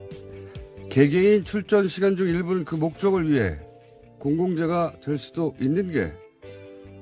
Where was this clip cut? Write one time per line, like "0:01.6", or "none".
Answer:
none

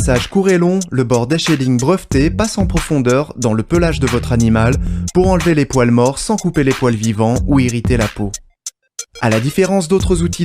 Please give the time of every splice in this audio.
none

